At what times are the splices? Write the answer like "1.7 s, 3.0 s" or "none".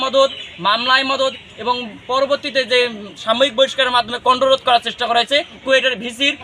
none